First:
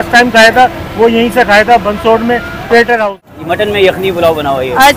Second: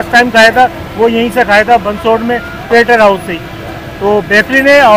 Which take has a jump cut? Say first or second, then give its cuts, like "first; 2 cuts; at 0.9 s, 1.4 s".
first; 1 cut; at 3.4 s